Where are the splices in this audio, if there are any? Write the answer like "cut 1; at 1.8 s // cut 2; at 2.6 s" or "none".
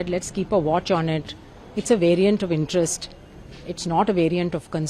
none